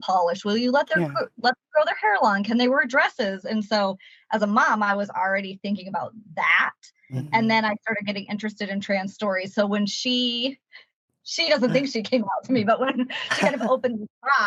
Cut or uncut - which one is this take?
uncut